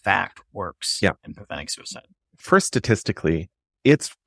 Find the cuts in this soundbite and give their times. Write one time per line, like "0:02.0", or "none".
0:02.4